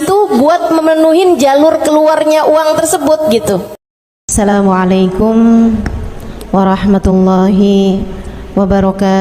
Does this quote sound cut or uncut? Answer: cut